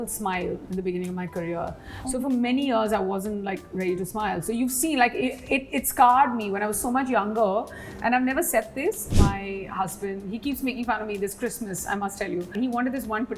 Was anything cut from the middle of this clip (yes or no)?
yes